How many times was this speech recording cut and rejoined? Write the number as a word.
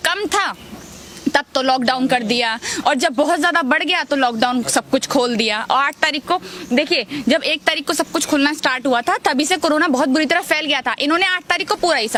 zero